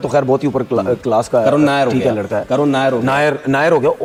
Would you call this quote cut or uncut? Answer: uncut